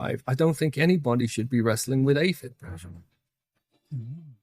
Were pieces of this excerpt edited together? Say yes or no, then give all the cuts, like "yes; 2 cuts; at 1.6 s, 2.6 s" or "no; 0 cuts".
no; 0 cuts